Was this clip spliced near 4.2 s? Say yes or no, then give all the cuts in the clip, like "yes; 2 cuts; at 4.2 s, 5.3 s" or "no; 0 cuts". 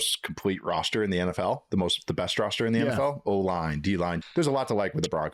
yes; 1 cut; at 4.2 s